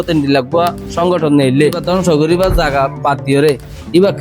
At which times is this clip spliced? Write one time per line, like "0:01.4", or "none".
0:01.8